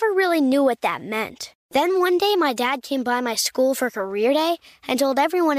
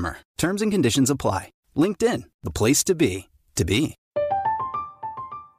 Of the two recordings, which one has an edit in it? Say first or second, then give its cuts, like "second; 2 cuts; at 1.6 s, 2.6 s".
second; 1 cut; at 4.0 s